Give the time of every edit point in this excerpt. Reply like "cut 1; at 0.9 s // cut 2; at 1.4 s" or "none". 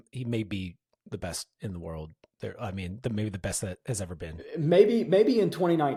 none